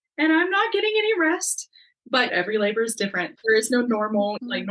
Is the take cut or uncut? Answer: cut